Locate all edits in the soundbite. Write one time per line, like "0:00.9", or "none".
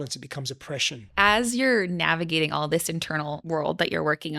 0:01.1
0:03.4

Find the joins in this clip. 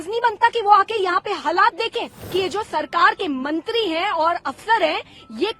0:02.2

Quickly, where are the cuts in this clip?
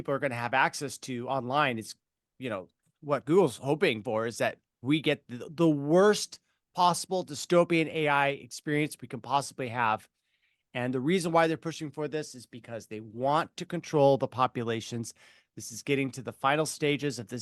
none

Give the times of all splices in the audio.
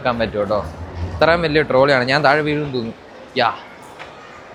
none

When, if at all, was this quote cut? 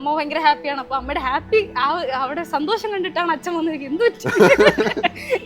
none

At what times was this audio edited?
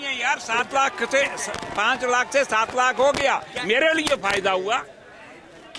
none

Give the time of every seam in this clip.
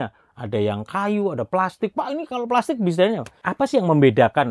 0:03.4

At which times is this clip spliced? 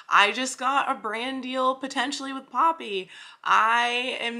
none

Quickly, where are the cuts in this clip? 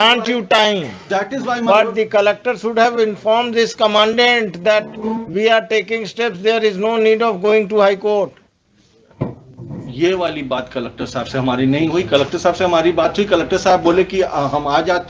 none

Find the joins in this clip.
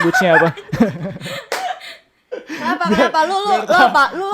none

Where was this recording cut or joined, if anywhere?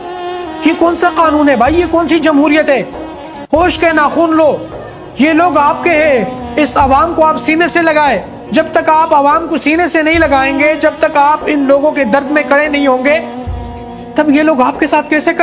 0:01.9

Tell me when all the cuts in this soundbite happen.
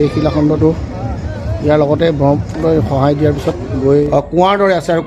0:04.1

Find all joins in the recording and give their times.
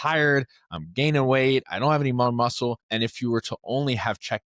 0:02.8

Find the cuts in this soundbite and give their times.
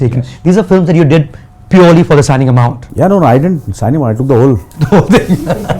0:02.8

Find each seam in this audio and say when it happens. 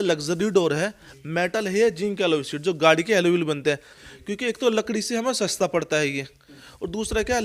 0:04.0

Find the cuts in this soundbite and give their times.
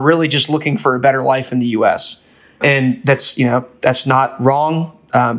none

